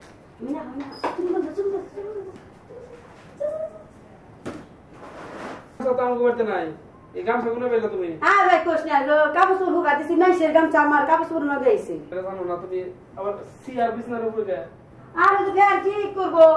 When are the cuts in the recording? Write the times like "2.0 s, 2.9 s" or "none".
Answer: 5.8 s, 12.2 s